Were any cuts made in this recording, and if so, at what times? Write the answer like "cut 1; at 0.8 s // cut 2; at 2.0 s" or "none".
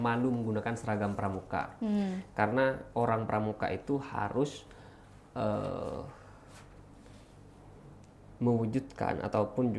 none